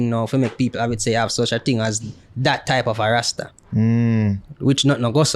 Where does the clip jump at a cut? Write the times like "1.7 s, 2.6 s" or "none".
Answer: none